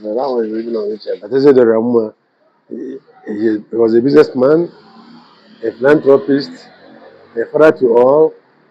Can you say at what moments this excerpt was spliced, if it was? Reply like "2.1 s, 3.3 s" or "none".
1.2 s